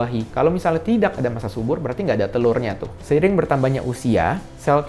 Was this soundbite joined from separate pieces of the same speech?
yes; 1 cut; at 2.9 s

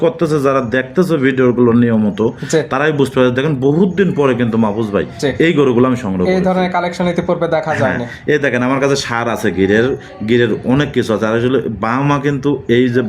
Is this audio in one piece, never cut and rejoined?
yes; 0 cuts

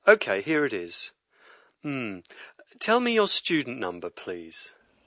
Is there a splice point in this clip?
no; 0 cuts

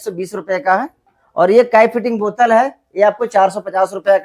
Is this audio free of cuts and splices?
yes; 0 cuts

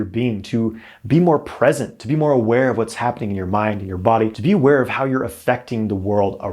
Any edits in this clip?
yes; 1 cut; at 4.4 s

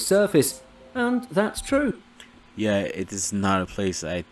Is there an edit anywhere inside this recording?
no; 0 cuts

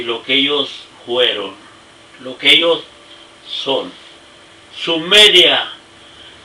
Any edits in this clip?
no; 0 cuts

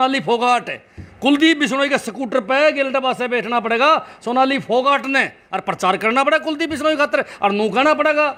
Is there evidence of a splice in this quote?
no; 0 cuts

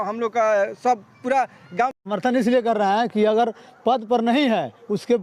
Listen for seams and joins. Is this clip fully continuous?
no; 1 cut; at 2.0 s

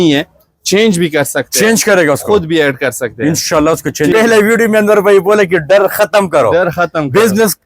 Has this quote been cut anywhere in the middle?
yes; 1 cut; at 4.1 s

